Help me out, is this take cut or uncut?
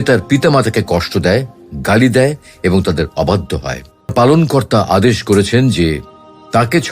cut